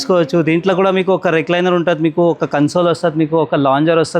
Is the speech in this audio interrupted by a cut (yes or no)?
no